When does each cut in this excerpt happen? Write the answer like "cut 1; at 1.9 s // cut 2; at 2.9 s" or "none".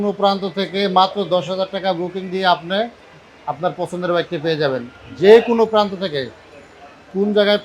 none